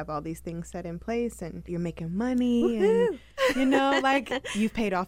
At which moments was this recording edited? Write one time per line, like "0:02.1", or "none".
0:01.5

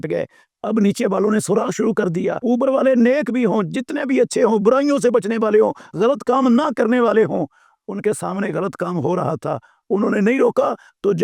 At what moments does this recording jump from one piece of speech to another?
0:02.4

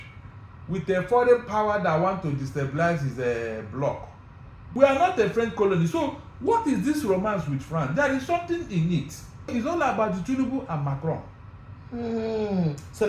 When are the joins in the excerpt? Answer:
0:04.7
0:09.5

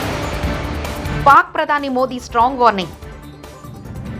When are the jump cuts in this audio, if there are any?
0:01.2

